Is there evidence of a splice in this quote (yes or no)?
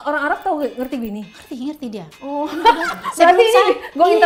no